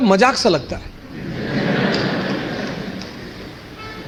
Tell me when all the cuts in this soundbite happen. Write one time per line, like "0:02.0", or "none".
none